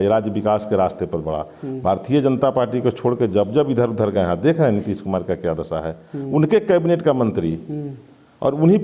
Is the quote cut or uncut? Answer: uncut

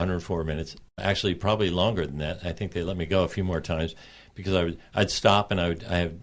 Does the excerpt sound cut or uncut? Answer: cut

